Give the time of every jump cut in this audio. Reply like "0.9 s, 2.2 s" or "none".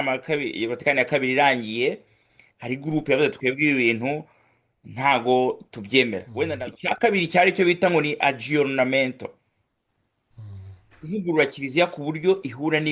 6.5 s